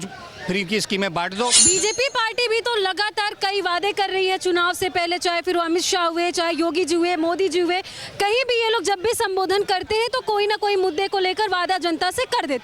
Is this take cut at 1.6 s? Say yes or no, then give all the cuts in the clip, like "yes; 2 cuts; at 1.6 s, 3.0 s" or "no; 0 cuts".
yes; 1 cut; at 1.6 s